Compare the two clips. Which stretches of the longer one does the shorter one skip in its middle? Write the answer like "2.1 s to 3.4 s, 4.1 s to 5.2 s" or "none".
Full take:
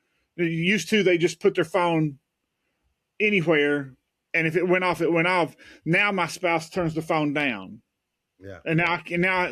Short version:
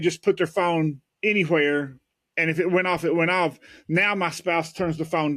2.2 s to 3.0 s